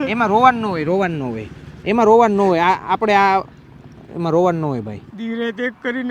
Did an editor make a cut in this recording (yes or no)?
yes